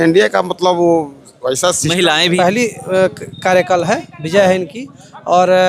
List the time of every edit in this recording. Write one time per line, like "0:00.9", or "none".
0:02.4